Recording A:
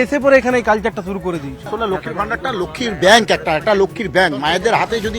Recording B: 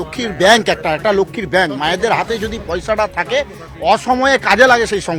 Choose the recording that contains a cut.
A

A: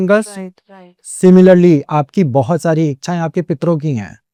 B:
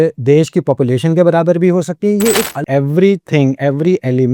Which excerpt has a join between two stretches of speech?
B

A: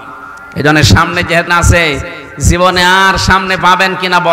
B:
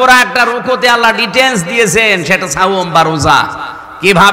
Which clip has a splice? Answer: A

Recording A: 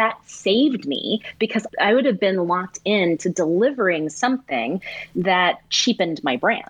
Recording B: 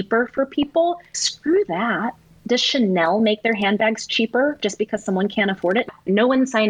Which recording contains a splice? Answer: B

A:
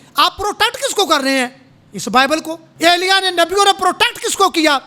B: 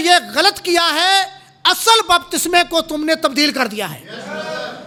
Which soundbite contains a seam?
A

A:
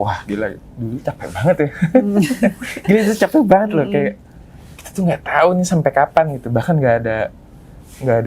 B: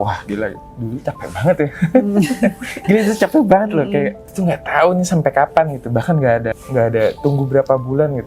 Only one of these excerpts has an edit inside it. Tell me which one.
B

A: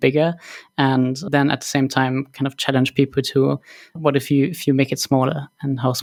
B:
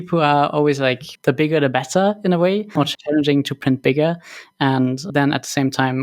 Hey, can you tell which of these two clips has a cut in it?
B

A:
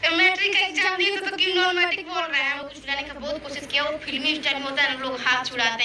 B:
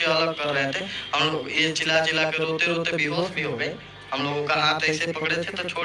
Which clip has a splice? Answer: A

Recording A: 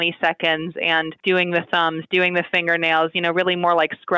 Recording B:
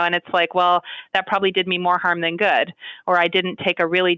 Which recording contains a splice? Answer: A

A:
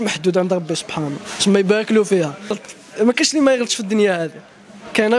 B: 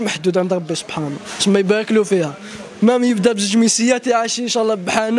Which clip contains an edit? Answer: A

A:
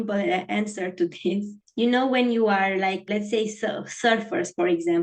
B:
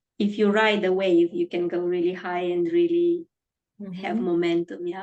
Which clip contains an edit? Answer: A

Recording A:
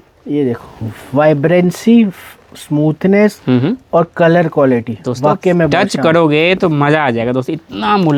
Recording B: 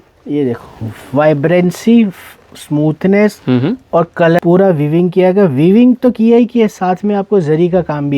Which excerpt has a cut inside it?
B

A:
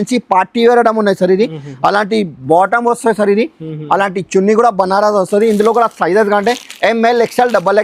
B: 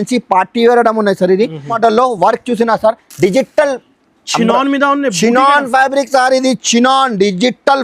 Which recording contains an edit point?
B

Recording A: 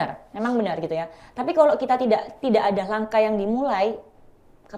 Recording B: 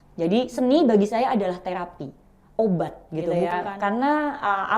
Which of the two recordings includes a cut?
B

